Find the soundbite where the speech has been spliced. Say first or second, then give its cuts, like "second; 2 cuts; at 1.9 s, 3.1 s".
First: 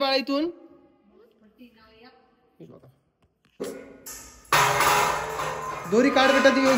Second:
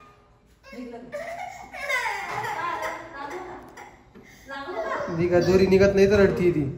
first; 1 cut; at 3.6 s